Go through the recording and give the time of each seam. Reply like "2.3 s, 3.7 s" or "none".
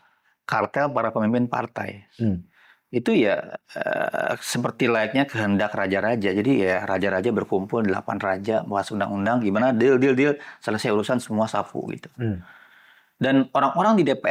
none